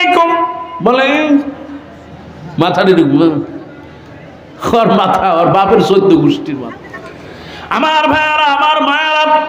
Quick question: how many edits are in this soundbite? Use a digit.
1